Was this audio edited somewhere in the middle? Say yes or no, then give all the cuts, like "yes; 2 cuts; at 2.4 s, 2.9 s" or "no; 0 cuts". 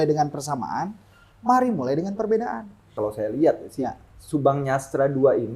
yes; 1 cut; at 2.9 s